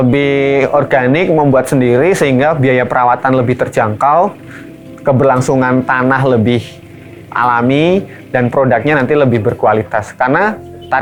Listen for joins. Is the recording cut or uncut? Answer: uncut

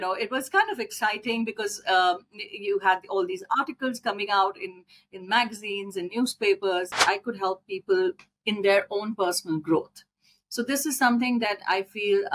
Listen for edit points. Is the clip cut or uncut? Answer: cut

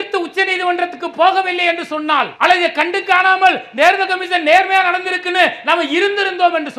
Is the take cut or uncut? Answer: uncut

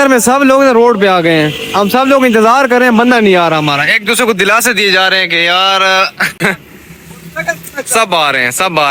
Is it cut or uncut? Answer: uncut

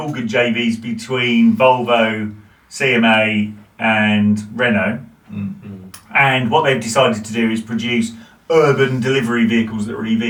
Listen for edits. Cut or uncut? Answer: uncut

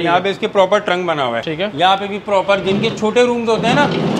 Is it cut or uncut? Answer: cut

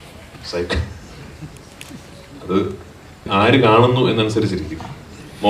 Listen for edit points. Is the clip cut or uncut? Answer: cut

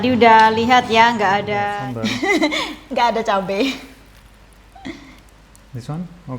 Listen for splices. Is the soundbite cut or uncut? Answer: cut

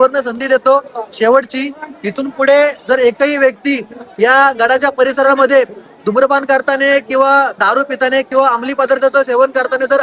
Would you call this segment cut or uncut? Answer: uncut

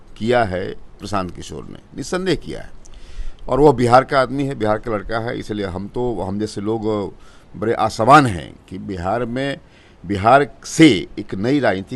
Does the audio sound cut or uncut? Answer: uncut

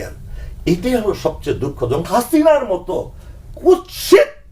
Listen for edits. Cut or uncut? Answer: cut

